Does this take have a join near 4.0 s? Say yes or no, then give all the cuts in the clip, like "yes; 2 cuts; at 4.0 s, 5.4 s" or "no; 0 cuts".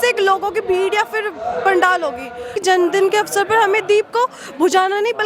no; 1 cut; at 2.5 s